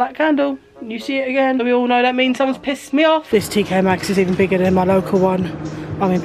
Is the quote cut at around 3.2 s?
yes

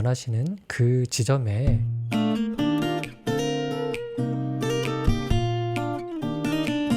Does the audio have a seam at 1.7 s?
yes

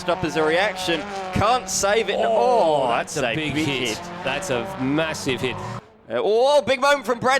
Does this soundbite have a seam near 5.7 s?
yes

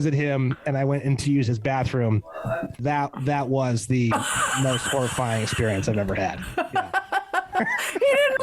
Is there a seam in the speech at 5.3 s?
no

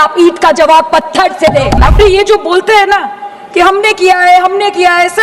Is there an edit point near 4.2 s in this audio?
no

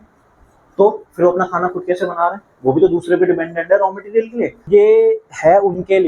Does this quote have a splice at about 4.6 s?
yes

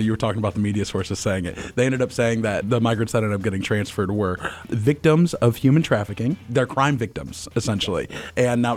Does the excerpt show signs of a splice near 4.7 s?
yes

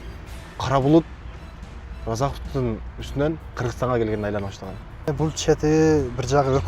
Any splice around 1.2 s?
no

